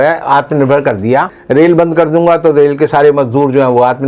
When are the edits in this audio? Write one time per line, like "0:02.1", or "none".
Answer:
0:01.4